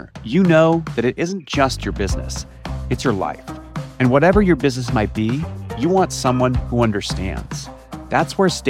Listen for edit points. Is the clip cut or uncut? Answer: uncut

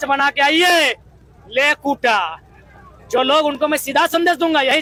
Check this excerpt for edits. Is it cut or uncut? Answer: uncut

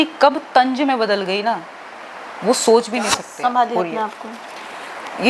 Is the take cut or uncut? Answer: cut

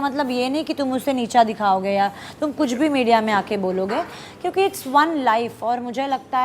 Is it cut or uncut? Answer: uncut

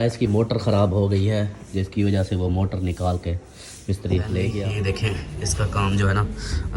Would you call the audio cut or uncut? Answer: cut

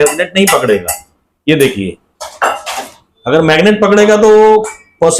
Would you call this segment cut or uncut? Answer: uncut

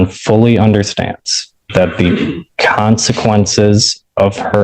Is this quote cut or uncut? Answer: uncut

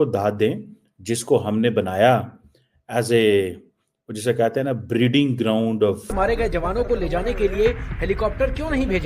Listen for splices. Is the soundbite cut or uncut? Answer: cut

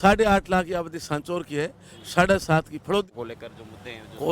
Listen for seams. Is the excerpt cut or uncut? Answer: cut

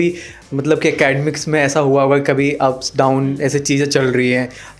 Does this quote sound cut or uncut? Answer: uncut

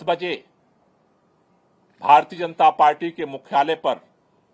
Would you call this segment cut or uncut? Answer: uncut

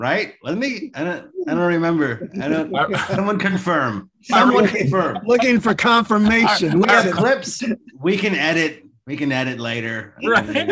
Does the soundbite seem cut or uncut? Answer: cut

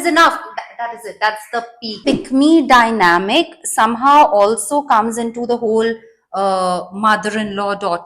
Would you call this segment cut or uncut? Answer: cut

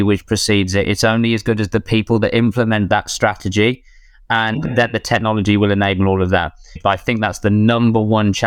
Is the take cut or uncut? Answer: cut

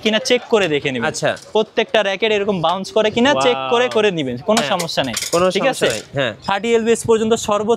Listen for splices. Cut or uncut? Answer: uncut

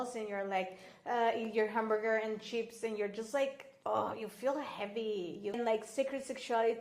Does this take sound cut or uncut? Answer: cut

